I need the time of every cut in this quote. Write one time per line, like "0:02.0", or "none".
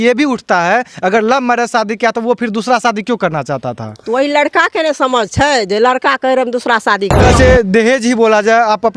0:07.2